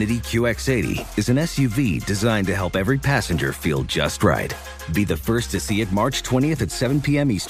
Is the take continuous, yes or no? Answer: yes